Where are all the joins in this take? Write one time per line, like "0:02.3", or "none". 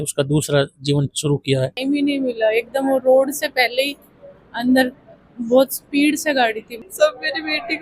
0:01.8
0:06.7